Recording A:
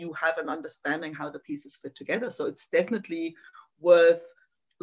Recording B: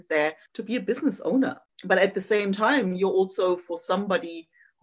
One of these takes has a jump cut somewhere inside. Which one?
B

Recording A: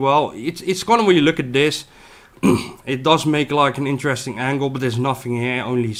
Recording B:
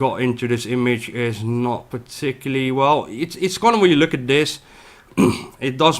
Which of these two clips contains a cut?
B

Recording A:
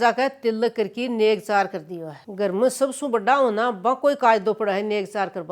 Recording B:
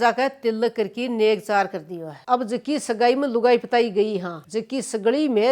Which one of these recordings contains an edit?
B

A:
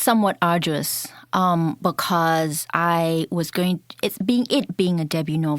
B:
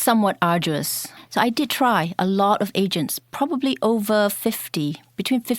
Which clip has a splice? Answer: B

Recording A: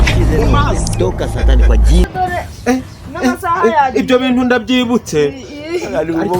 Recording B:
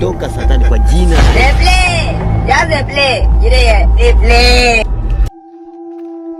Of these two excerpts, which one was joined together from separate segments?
A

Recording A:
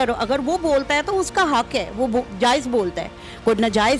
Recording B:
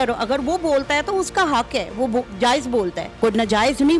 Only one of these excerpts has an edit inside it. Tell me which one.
B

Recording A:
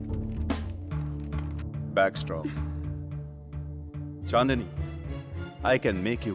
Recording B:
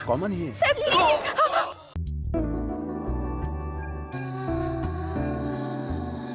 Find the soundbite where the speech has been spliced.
B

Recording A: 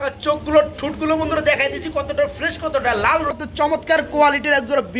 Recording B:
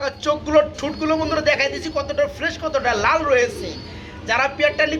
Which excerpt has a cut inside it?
A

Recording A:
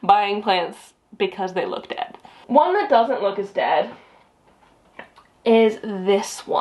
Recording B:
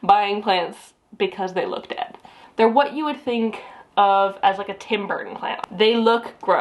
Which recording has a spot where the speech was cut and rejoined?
B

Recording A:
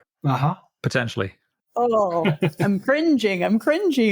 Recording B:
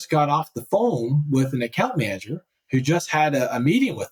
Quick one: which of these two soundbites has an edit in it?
A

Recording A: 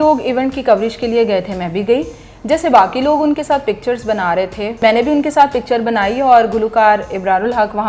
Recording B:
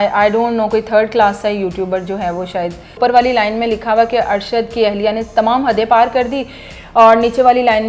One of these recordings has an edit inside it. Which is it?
B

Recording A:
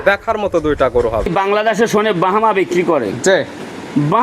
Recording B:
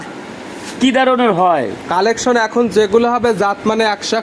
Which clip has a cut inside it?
A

